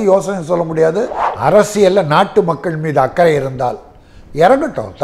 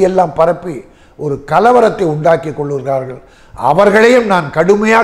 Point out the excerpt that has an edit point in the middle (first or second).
first